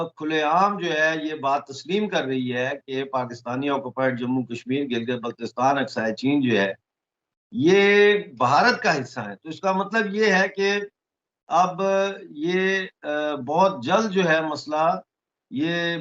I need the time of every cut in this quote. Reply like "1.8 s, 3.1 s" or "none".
none